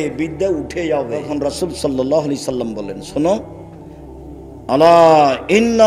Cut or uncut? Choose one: cut